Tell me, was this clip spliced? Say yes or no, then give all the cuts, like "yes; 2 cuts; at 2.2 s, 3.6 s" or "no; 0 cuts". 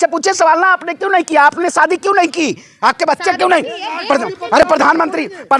no; 0 cuts